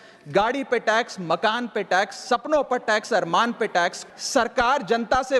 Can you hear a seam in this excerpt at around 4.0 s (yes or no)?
yes